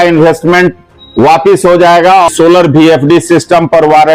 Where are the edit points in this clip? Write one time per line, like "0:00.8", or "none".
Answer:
0:02.3